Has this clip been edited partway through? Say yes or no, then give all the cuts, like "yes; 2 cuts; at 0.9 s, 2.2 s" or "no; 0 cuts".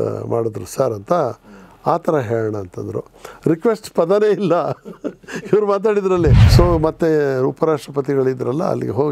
yes; 1 cut; at 6.4 s